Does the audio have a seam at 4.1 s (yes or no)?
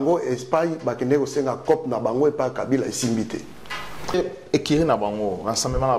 yes